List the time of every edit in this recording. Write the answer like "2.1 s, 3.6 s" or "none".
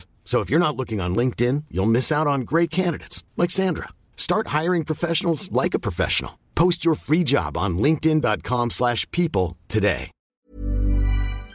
10.4 s